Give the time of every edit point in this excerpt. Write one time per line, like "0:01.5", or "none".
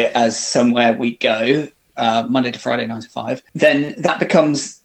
0:03.5